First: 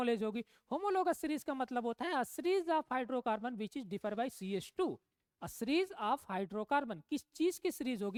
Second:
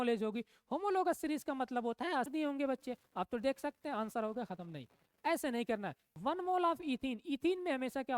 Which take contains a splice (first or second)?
second